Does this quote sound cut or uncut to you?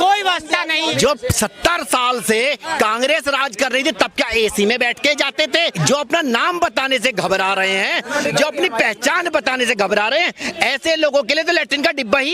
cut